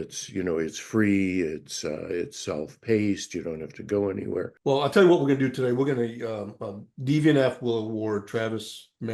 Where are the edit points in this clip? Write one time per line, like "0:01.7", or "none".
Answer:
0:04.5